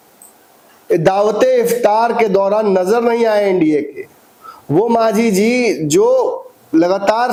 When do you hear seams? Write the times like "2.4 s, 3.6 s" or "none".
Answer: none